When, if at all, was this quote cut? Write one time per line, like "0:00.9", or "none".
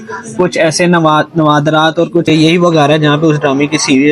0:02.3

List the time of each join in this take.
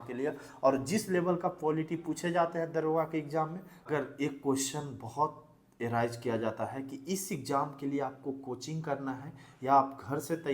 0:03.7

